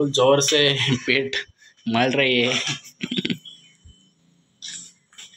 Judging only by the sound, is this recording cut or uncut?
uncut